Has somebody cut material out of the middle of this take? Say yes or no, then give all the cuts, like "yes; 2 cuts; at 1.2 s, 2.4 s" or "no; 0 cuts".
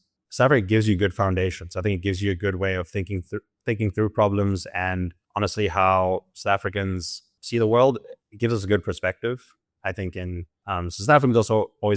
yes; 1 cut; at 10.5 s